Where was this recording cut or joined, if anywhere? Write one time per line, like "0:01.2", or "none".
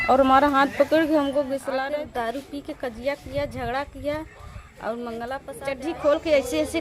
0:01.8
0:05.5

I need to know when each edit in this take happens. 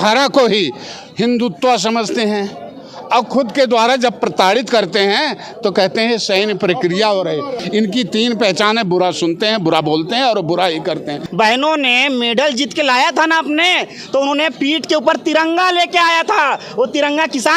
0:07.6
0:11.2

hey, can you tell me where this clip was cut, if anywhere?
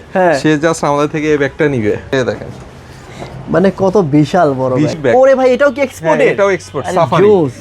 0:02.1
0:05.0

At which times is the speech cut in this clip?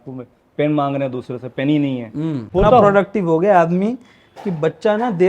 0:02.5

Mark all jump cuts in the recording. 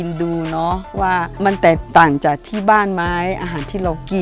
0:01.1

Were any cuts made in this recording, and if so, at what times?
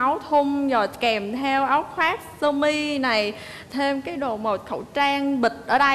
none

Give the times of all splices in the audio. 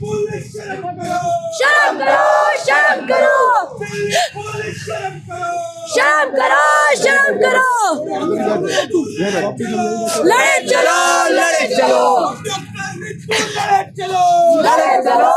none

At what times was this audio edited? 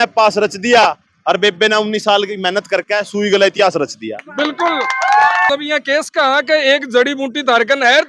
0:05.5

